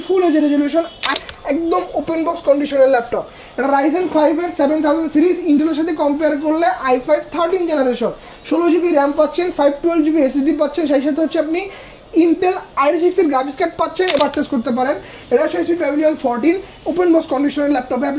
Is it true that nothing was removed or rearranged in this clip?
no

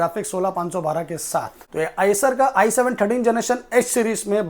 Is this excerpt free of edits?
no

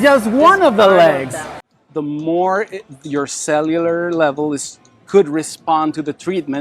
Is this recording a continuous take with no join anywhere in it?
no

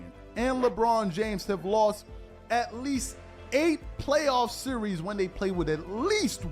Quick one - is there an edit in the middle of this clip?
no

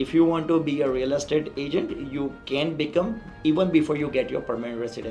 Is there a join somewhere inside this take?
no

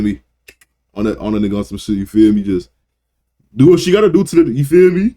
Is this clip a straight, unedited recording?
yes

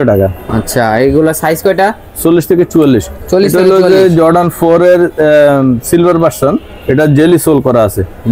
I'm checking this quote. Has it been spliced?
no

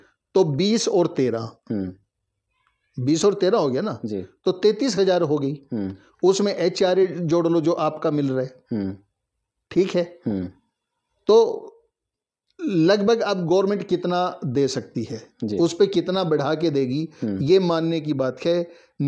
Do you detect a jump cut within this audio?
no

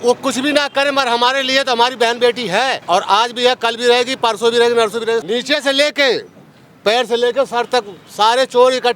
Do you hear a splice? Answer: yes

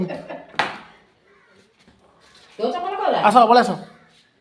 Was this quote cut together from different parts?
no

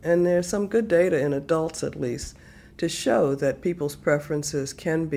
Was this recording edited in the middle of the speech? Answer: no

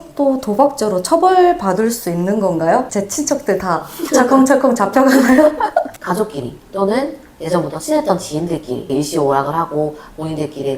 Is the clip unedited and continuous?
no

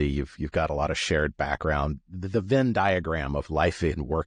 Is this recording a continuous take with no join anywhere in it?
yes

